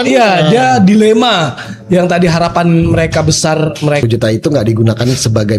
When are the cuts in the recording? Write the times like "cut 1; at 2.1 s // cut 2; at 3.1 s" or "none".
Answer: cut 1; at 4.0 s